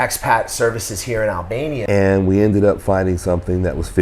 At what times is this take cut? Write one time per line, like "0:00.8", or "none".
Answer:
0:01.8